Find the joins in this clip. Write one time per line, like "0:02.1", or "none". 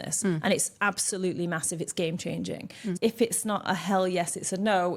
0:02.9